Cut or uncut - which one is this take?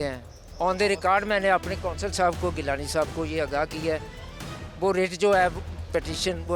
uncut